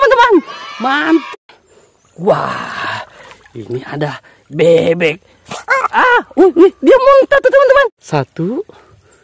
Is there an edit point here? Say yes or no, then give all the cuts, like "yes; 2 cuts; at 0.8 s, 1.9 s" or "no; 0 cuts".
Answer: yes; 2 cuts; at 1.3 s, 7.9 s